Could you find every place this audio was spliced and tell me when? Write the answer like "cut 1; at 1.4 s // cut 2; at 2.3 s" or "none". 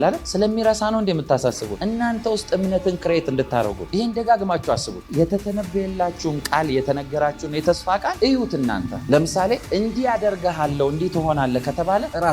cut 1; at 5.1 s